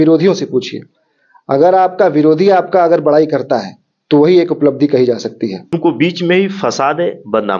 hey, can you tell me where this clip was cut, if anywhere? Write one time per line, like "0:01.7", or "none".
0:05.7